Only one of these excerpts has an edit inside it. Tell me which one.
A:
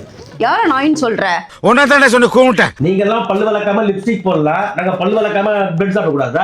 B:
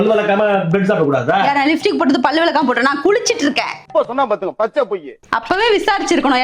A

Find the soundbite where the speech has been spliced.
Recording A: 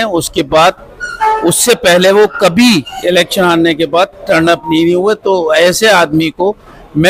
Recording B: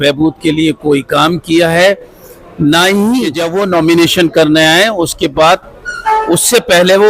B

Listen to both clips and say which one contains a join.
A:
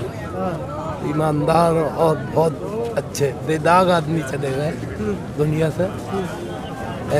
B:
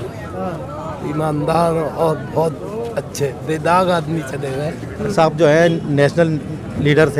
B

